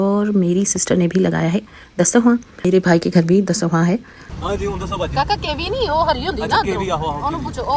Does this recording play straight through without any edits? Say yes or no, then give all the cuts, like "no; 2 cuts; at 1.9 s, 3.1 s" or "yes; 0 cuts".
no; 2 cuts; at 2.7 s, 4.2 s